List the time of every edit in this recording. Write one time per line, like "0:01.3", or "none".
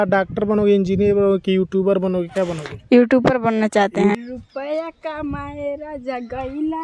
0:04.1